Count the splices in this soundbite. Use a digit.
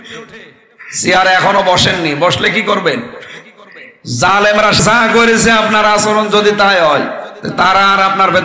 1